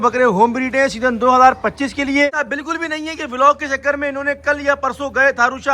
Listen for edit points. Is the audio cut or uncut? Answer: cut